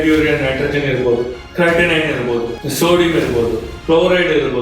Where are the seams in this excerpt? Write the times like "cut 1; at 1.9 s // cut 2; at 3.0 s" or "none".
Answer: cut 1; at 1.4 s // cut 2; at 2.6 s